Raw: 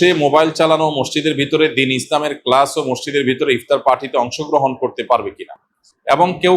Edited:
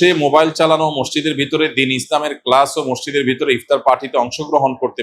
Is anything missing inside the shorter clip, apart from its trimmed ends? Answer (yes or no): no